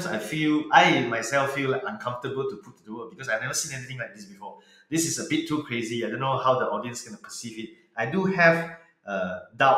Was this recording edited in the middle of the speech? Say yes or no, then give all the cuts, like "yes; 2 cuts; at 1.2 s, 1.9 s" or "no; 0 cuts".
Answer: no; 0 cuts